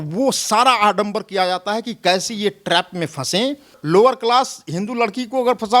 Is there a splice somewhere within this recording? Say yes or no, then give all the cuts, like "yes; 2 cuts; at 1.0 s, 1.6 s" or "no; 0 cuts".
yes; 1 cut; at 3.8 s